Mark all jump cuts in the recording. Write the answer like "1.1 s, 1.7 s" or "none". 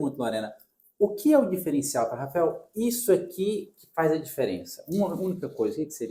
none